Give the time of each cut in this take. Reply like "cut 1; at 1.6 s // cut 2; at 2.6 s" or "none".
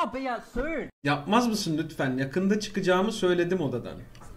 none